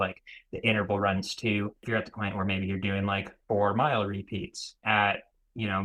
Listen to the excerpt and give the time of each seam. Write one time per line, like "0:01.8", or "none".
0:01.8
0:04.8